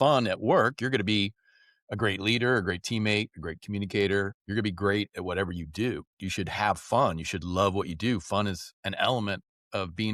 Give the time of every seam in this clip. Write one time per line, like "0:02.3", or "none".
0:04.4
0:06.1